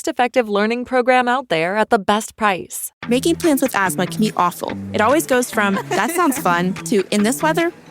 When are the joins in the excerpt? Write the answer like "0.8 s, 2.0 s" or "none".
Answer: 2.9 s